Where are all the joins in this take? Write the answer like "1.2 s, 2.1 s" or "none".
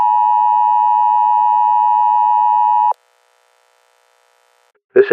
2.9 s

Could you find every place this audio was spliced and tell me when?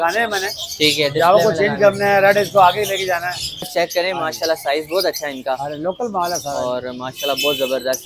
3.7 s

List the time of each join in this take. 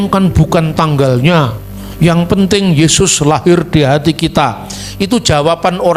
none

